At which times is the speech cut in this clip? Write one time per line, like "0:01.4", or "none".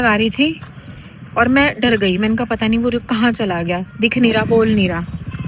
none